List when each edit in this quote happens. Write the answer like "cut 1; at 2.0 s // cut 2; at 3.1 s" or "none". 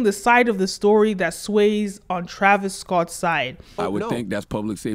cut 1; at 3.6 s